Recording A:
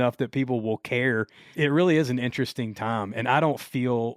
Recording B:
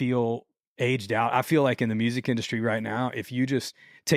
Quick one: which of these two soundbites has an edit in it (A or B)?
A